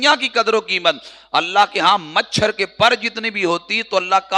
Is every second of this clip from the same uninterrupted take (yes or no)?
yes